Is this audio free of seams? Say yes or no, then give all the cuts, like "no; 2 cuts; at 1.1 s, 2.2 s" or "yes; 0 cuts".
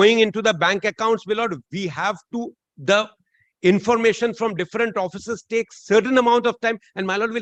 yes; 0 cuts